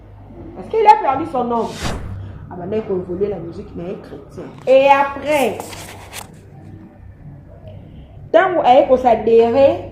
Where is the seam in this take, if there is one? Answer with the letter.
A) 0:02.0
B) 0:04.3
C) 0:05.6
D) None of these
A